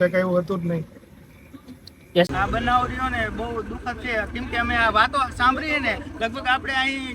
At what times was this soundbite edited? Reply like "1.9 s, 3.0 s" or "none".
2.3 s